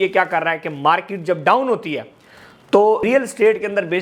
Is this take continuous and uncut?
no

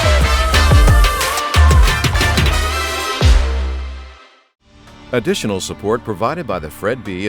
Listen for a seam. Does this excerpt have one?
yes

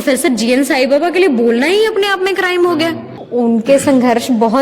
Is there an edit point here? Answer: yes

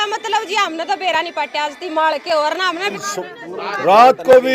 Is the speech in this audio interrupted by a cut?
yes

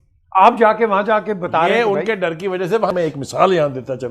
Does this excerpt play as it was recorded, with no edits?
no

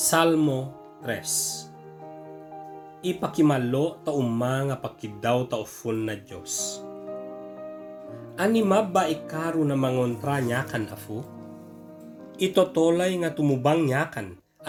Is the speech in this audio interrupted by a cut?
no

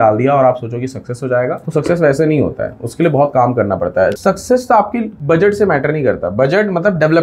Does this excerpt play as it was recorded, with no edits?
no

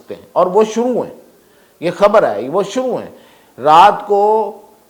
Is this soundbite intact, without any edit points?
yes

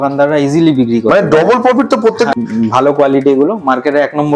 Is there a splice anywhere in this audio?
yes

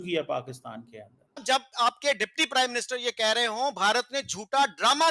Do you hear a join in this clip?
yes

